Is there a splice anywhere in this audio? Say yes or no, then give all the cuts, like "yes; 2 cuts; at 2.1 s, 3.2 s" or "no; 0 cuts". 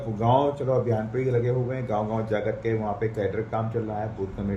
no; 0 cuts